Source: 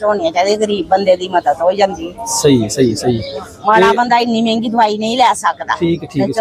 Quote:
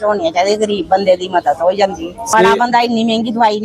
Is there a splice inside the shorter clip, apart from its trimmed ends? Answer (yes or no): yes